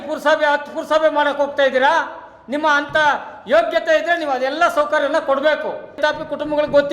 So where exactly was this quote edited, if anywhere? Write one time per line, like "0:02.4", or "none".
0:06.0